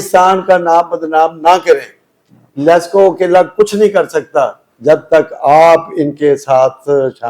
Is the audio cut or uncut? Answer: uncut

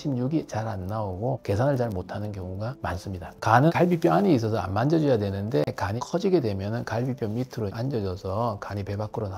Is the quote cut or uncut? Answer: cut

